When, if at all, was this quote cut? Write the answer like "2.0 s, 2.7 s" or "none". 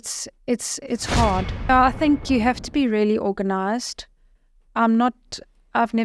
1.7 s